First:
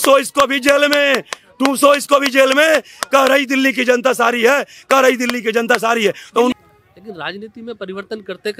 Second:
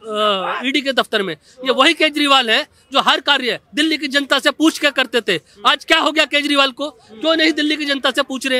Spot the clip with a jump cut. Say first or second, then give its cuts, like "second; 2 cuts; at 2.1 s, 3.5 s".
first; 1 cut; at 6.6 s